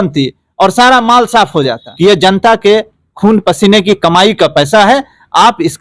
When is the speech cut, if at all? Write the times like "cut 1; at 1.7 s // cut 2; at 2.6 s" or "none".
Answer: cut 1; at 1.8 s